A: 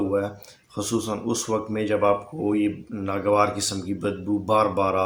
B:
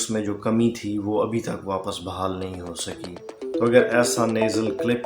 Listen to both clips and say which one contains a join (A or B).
B